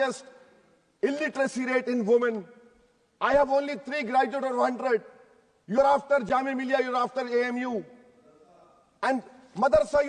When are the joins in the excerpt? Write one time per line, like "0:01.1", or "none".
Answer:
none